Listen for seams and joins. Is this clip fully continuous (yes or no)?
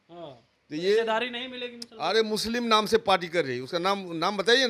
yes